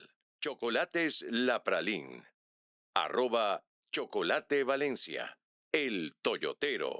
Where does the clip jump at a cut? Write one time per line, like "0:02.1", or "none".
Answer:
none